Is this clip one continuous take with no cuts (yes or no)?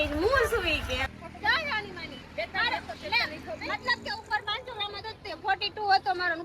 no